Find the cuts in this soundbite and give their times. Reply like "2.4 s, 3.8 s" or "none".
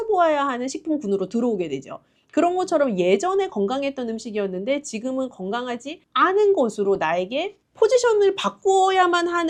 none